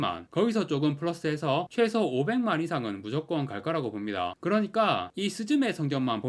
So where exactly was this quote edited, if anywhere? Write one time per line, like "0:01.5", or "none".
0:04.3